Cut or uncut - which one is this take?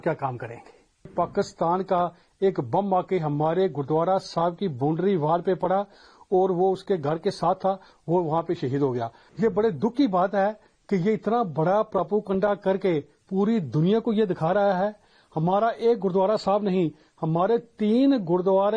cut